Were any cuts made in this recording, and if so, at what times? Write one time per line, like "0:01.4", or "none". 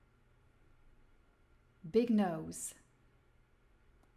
none